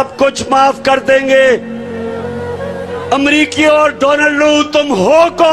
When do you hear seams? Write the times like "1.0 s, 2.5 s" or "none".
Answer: 1.7 s, 3.1 s